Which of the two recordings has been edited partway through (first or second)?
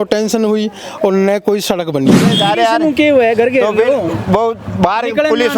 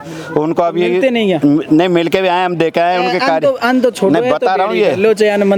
first